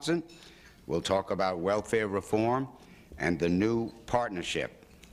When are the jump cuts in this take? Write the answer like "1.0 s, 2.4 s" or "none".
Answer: 1.2 s